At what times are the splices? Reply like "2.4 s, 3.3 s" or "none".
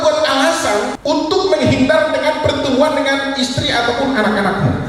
0.9 s